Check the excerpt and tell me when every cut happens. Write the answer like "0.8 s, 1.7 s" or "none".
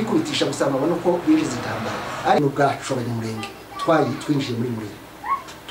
2.4 s